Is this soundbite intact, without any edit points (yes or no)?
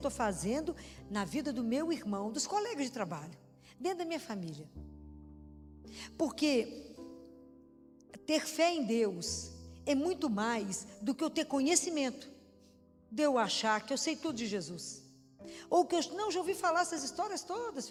yes